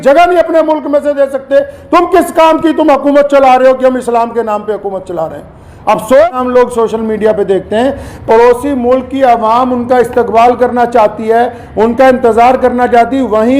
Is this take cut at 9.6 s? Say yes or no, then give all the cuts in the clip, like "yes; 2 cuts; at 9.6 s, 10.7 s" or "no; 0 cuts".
no; 1 cut; at 6.3 s